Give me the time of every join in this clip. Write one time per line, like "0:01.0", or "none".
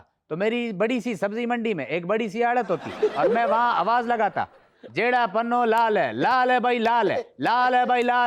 none